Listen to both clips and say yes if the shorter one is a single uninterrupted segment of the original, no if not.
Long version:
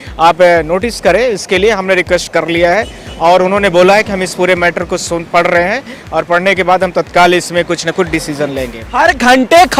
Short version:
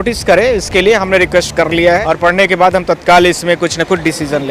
no